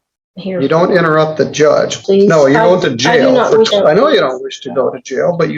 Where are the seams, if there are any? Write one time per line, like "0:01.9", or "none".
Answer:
0:02.0
0:03.7